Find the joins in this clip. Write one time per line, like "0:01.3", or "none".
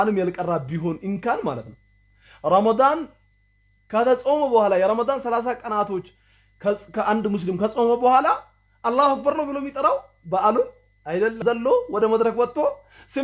0:11.4